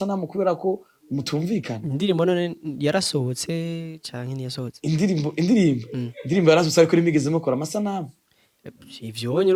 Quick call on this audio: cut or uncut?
uncut